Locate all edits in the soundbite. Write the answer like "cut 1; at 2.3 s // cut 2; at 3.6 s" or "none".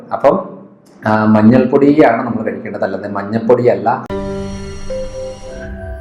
cut 1; at 4.1 s